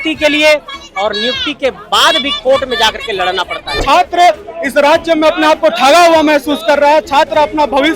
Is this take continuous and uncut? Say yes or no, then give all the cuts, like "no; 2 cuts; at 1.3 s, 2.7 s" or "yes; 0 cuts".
no; 1 cut; at 3.8 s